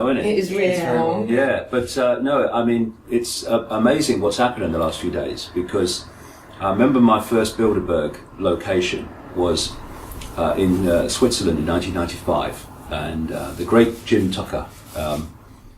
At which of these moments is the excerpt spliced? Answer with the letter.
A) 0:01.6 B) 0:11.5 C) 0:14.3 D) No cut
C